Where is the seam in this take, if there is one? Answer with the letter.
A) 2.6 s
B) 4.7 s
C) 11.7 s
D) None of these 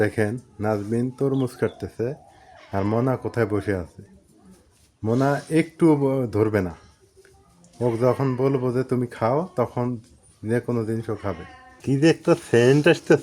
C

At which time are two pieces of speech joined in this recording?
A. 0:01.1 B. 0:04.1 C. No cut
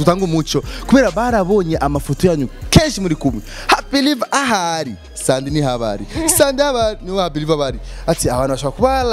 C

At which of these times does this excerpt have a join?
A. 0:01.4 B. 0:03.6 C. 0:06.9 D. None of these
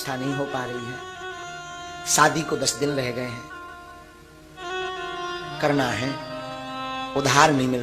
A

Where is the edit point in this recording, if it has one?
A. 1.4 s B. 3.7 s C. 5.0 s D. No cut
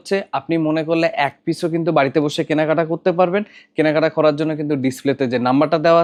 D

